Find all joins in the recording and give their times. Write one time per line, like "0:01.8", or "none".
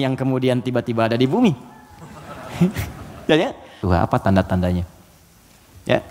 0:03.8